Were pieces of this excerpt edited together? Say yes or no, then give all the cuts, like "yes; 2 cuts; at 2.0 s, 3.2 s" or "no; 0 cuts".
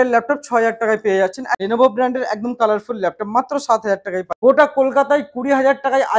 yes; 2 cuts; at 1.5 s, 4.3 s